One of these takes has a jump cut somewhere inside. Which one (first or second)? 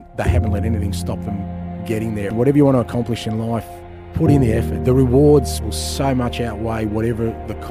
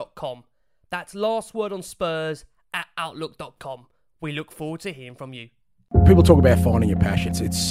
second